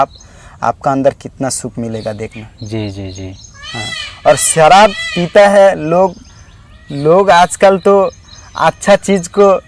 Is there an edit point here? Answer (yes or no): no